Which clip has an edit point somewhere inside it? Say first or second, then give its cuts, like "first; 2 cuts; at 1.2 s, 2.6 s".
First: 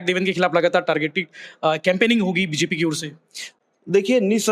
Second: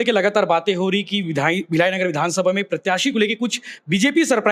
first; 1 cut; at 3.4 s